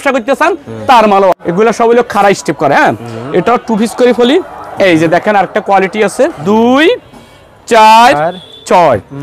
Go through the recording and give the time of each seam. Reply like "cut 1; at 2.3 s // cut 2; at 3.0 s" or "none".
cut 1; at 1.3 s // cut 2; at 6.4 s

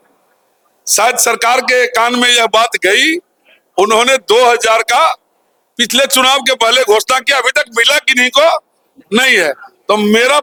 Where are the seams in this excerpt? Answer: none

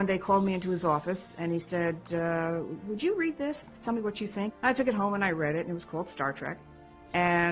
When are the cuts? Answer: cut 1; at 4.5 s

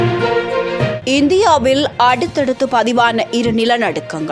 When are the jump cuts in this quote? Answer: cut 1; at 1.0 s

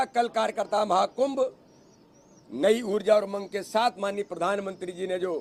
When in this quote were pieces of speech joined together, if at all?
none

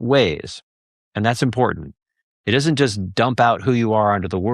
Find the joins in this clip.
none

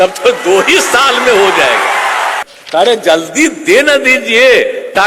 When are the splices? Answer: cut 1; at 2.5 s

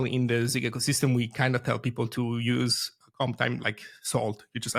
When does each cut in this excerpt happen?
none

